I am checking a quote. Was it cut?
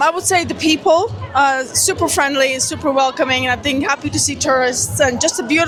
no; 0 cuts

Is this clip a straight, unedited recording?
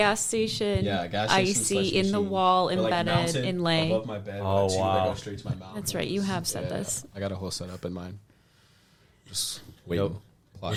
yes; 0 cuts

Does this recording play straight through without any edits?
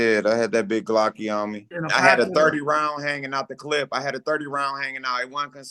no; 1 cut; at 1.7 s

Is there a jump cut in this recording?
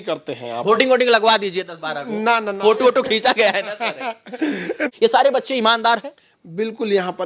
yes; 1 cut; at 4.9 s

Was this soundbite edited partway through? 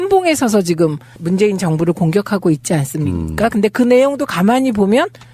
yes; 1 cut; at 3.7 s

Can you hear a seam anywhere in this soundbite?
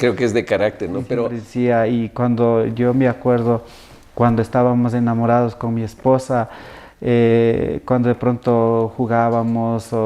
yes; 1 cut; at 1.4 s

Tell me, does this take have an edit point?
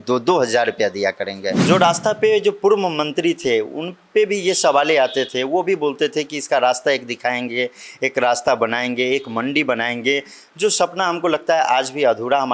yes; 1 cut; at 1.5 s

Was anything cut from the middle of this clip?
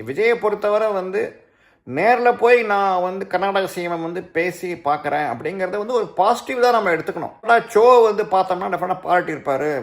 yes; 1 cut; at 7.4 s

